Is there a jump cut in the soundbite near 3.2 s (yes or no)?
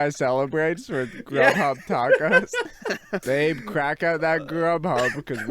yes